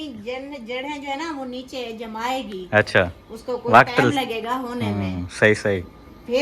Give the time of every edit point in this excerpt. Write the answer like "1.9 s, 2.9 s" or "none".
none